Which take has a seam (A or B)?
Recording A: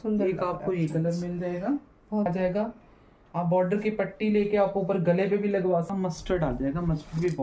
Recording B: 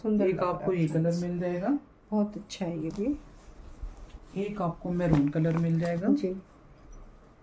A